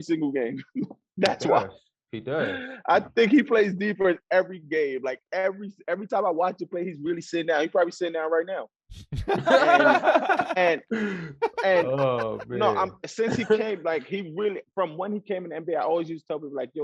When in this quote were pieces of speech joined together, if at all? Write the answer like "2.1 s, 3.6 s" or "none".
none